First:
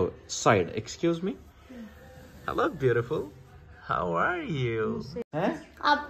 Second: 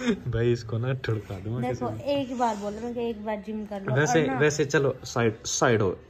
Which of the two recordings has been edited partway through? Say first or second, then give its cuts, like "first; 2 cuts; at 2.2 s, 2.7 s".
first; 1 cut; at 5.2 s